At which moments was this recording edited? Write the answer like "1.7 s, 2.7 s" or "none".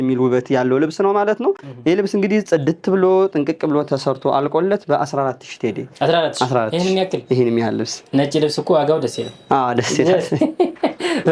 none